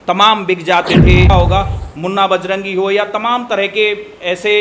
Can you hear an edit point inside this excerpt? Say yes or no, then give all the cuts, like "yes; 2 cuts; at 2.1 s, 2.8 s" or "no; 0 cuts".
yes; 1 cut; at 1.3 s